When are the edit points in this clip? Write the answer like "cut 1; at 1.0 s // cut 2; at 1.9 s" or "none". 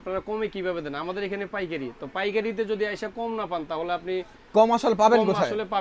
none